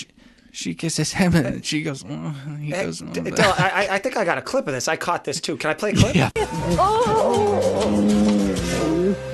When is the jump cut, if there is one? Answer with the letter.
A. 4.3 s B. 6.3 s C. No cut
B